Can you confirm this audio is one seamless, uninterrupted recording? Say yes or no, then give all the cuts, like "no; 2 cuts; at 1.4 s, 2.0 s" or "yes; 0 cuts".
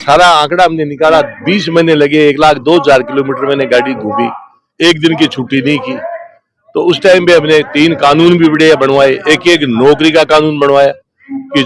yes; 0 cuts